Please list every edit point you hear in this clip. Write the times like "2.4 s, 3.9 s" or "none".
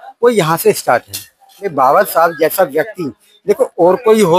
1.7 s